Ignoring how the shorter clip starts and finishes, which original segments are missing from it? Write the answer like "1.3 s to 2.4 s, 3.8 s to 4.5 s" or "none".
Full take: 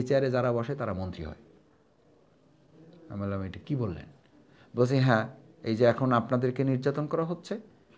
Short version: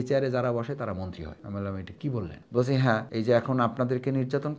1.4 s to 3.0 s, 4.1 s to 4.6 s, 5.3 s to 5.6 s

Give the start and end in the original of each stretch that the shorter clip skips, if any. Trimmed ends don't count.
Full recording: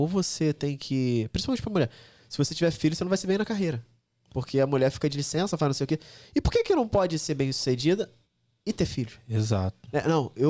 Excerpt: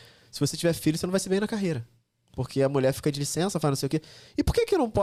none

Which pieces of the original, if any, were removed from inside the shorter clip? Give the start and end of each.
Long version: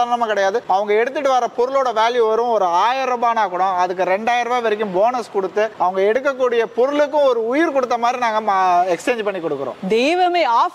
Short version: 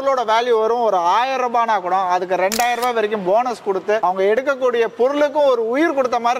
5.7 s to 5.8 s

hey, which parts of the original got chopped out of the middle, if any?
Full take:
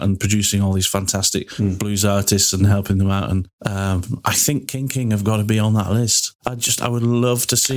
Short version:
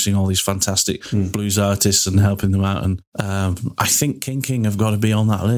none

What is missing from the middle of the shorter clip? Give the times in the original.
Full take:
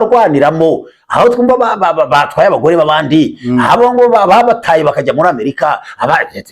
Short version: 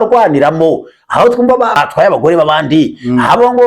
1.8 s to 2.2 s

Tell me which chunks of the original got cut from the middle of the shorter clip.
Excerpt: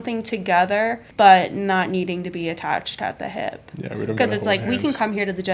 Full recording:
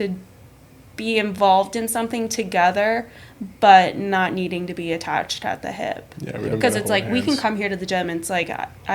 3.1 s to 3.5 s

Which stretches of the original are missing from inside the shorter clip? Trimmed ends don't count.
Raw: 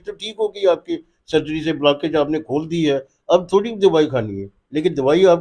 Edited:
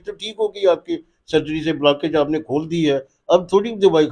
none

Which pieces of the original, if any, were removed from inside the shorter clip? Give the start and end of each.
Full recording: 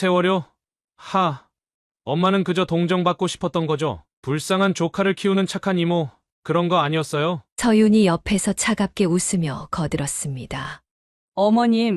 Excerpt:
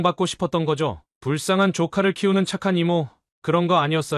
none

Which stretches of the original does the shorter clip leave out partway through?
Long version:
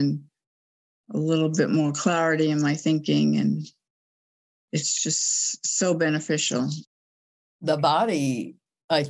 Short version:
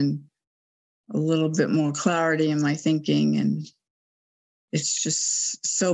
none

